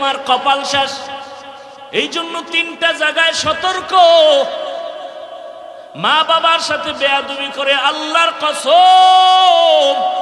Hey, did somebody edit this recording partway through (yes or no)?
yes